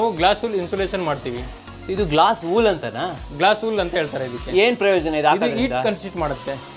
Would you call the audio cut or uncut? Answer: uncut